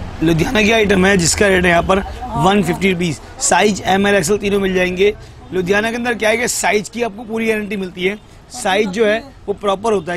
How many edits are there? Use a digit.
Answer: 0